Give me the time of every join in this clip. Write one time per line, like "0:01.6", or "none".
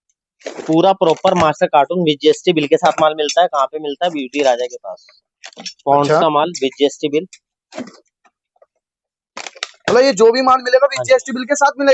none